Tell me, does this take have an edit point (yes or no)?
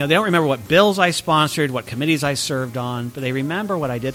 no